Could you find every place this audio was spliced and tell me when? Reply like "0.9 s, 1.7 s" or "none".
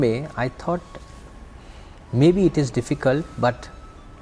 none